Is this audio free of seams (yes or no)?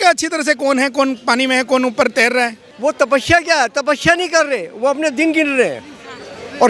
no